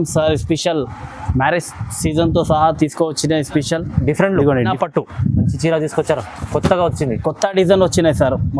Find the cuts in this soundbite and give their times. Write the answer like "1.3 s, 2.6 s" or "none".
4.7 s